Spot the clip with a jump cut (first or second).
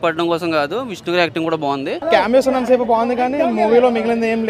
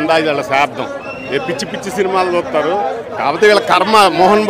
first